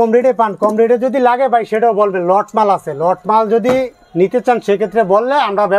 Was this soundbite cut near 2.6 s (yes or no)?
no